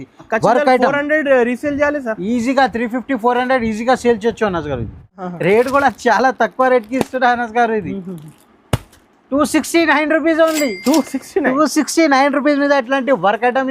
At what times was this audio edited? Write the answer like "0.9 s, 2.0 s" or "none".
5.1 s